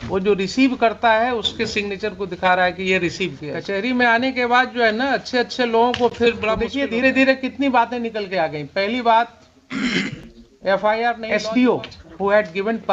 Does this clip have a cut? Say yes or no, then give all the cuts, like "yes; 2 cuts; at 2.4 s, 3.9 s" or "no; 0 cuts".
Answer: yes; 3 cuts; at 3.5 s, 6.7 s, 11.2 s